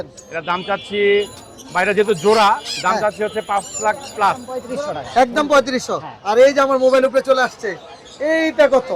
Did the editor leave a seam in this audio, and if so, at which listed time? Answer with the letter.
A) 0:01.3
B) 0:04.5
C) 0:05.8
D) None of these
B